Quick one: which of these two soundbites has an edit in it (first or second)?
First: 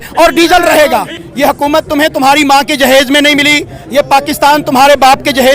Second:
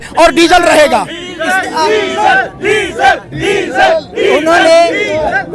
first